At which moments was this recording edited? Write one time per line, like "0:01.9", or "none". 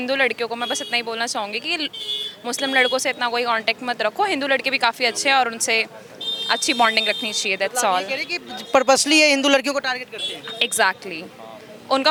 none